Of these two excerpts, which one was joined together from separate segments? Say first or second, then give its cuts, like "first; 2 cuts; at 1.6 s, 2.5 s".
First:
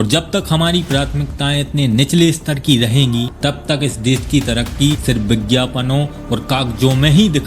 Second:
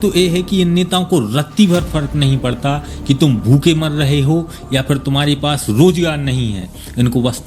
first; 2 cuts; at 3.3 s, 5.0 s